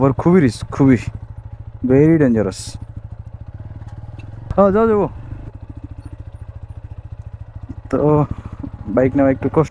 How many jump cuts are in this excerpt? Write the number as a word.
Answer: one